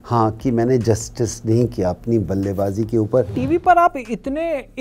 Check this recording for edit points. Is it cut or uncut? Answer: cut